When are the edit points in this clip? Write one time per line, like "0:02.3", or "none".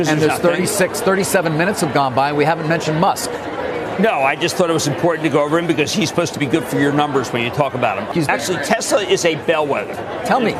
0:08.0